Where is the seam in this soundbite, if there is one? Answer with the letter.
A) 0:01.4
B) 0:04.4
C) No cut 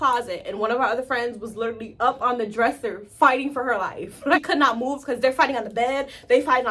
B